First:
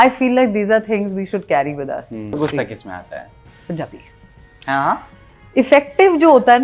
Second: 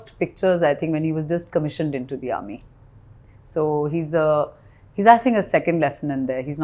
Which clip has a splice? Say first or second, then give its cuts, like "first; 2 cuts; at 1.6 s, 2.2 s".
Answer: first; 1 cut; at 2.3 s